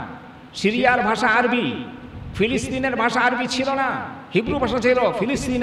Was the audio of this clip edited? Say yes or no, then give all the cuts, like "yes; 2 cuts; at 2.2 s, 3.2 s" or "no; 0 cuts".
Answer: no; 0 cuts